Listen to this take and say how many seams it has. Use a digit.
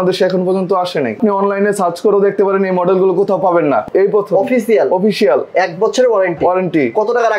2